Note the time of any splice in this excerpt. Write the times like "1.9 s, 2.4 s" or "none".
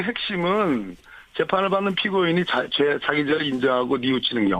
1.6 s